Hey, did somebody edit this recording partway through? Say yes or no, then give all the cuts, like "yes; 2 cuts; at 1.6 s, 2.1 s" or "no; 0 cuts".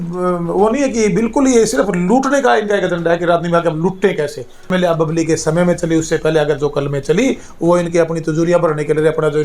yes; 1 cut; at 4.7 s